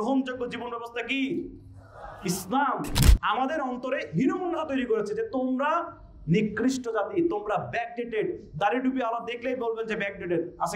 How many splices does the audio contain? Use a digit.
1